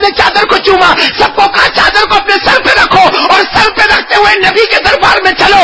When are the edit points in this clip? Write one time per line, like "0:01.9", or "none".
none